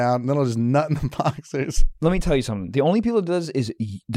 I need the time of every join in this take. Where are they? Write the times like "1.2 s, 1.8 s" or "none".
1.8 s